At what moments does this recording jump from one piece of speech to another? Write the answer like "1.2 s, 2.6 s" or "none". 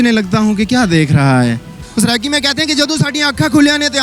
1.8 s